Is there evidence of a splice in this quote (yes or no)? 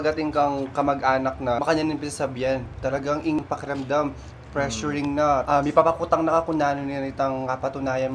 yes